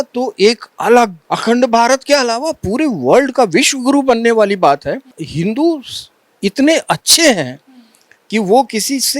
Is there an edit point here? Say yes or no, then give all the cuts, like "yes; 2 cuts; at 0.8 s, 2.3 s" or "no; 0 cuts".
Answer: yes; 2 cuts; at 1.2 s, 5.2 s